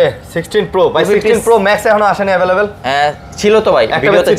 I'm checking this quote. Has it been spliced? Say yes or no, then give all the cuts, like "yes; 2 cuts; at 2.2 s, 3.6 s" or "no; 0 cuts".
no; 0 cuts